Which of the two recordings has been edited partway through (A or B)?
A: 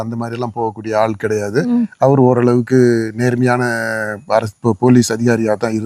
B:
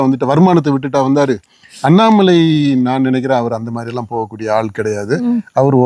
B